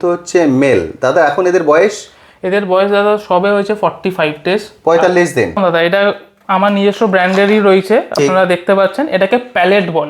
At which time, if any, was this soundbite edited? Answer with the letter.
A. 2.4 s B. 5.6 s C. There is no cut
B